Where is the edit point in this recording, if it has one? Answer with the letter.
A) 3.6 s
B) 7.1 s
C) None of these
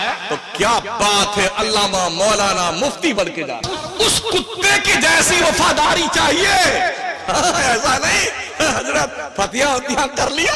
A